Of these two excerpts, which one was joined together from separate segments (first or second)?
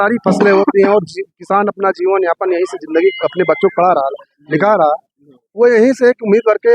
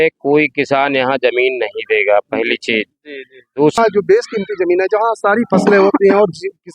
second